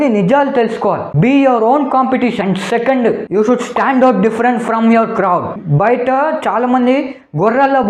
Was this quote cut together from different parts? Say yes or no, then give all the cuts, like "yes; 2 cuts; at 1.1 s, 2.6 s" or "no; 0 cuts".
no; 0 cuts